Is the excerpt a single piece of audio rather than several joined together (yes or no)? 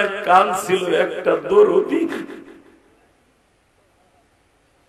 yes